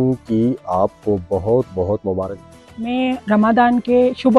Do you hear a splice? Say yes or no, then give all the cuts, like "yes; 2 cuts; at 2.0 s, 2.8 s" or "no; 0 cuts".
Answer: yes; 1 cut; at 2.4 s